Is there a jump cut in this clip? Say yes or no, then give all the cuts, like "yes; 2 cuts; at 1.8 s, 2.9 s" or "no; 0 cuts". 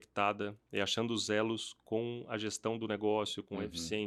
no; 0 cuts